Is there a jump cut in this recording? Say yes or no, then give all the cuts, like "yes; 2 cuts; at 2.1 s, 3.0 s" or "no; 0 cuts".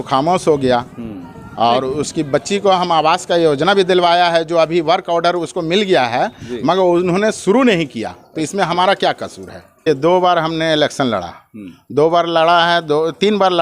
yes; 1 cut; at 9.9 s